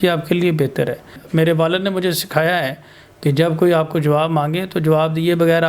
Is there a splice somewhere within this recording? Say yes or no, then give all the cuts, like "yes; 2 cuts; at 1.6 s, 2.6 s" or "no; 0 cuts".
yes; 1 cut; at 1.2 s